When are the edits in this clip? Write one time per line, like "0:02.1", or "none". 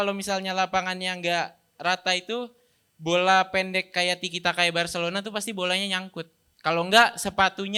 none